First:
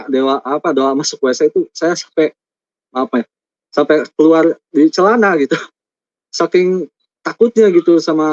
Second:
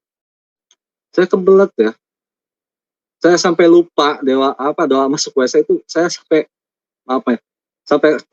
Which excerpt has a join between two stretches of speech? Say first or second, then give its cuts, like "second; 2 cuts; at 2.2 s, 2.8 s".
first; 1 cut; at 5.6 s